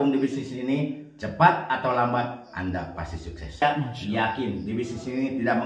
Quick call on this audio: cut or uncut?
cut